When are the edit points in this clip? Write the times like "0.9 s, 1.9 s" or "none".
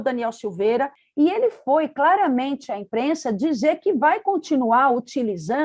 1.0 s